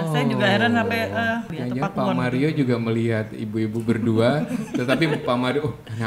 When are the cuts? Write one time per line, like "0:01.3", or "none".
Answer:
0:01.5